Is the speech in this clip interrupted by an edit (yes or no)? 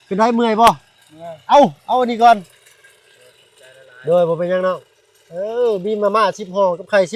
no